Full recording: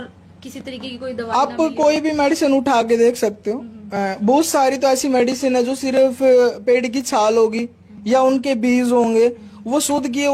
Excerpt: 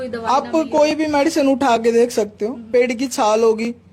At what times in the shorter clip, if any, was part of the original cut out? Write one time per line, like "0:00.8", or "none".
0:02.6